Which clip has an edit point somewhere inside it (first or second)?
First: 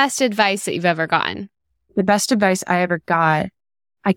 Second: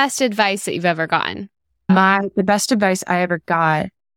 first